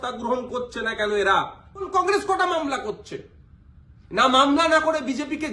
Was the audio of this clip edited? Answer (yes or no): yes